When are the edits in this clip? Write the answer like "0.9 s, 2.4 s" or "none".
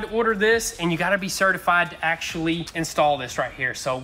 2.7 s